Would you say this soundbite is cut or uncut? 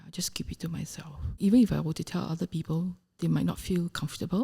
cut